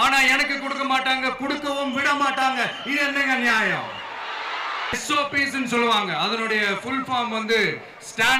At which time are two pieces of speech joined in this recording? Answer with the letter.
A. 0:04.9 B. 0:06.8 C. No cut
A